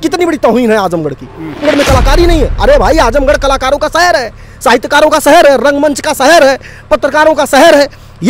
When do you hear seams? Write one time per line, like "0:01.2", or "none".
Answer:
0:01.6